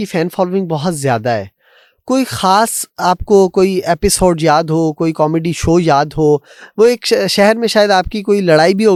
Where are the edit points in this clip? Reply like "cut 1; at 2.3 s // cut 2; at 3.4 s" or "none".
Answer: none